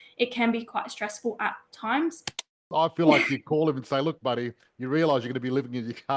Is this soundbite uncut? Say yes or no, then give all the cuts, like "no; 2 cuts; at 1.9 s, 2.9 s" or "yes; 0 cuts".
no; 1 cut; at 2.6 s